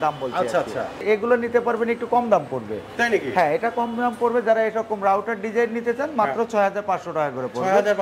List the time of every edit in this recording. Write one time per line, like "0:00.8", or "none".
0:01.0